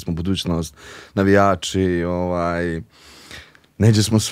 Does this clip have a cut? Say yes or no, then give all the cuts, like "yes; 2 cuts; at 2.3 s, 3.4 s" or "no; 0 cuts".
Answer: no; 0 cuts